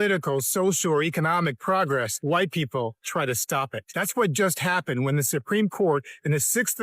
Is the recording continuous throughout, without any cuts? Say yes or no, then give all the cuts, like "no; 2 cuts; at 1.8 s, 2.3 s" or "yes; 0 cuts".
no; 2 cuts; at 2.1 s, 3.8 s